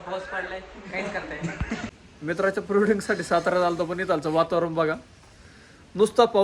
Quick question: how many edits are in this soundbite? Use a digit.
1